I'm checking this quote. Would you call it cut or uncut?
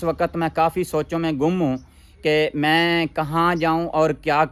uncut